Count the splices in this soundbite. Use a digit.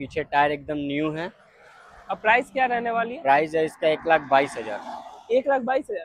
0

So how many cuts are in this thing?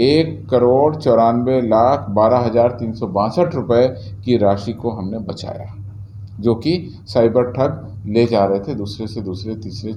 0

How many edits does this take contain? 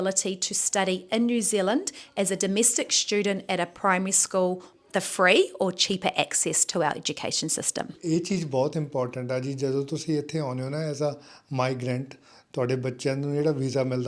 2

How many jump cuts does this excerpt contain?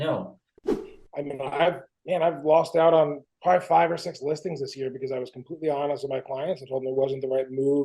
3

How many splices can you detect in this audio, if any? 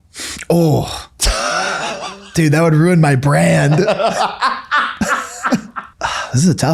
2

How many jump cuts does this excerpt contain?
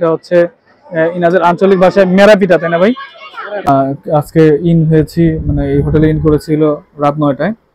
1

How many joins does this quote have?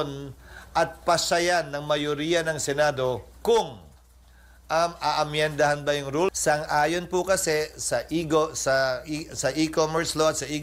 1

